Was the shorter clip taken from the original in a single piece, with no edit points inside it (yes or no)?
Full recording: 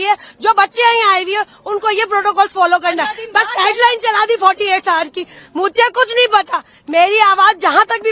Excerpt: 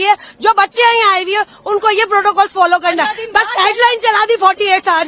yes